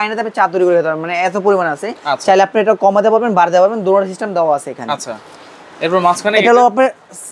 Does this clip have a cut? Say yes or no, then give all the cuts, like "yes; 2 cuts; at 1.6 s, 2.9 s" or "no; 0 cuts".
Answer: no; 0 cuts